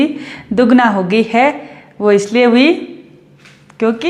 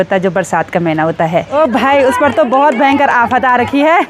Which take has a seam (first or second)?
second